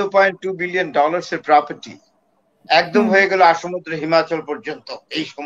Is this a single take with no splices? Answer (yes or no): yes